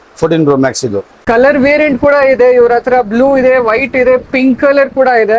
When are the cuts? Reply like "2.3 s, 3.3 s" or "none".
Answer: 1.1 s